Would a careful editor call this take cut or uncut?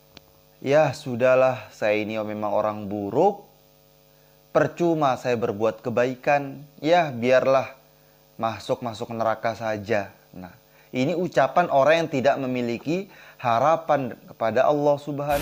uncut